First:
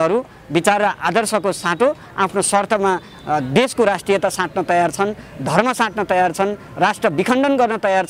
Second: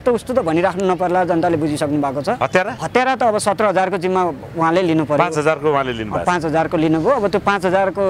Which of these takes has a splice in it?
second; 1 cut; at 2.4 s

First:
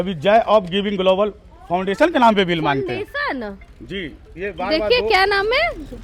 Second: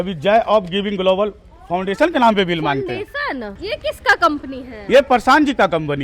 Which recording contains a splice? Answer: second; 1 cut; at 3.5 s

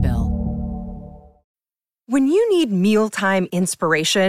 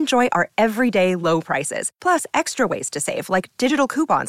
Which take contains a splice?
first; 1 cut; at 1.5 s

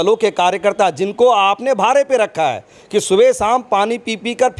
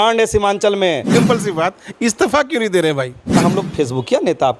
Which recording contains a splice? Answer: second; 2 cuts; at 1.1 s, 3.4 s

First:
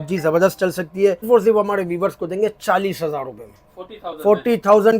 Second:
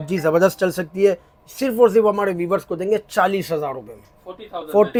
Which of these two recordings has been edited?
first; 1 cut; at 1.2 s

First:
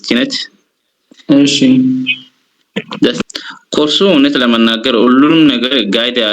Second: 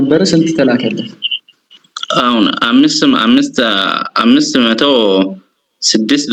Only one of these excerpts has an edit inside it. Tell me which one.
first; 1 cut; at 3.2 s

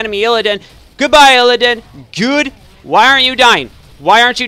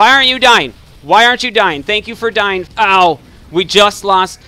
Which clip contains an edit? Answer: second; 1 cut; at 2.7 s

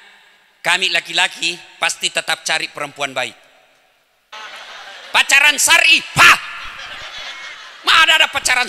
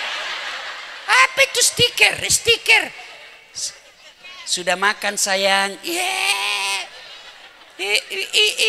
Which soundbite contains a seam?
first; 1 cut; at 4.3 s

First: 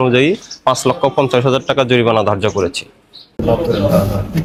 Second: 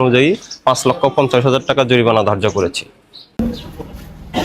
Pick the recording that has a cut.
second; 1 cut; at 3.4 s

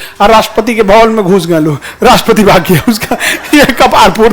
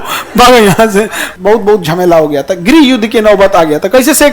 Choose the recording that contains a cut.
second; 1 cut; at 1.2 s

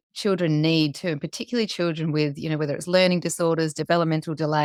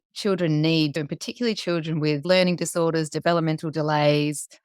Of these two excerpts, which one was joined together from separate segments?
second; 2 cuts; at 1.0 s, 2.2 s

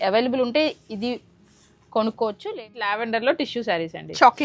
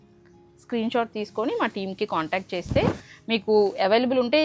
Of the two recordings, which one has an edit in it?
first; 1 cut; at 2.5 s

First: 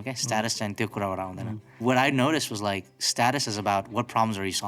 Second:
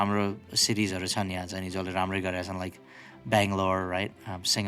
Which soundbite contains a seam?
first; 1 cut; at 1.8 s

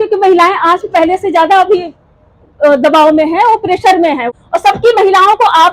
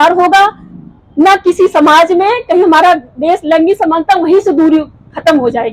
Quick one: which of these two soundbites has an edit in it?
first; 1 cut; at 4.3 s

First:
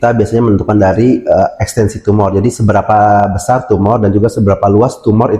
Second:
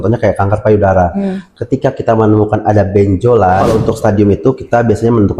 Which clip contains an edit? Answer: second; 1 cut; at 3.6 s

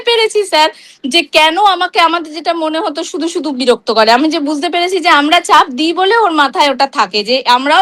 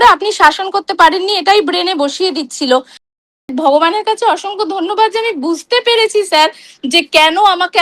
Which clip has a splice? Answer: second; 1 cut; at 3.2 s

